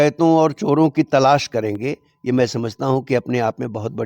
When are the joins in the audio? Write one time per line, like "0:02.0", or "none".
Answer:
none

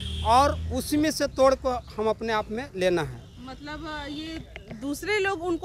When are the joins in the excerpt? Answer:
none

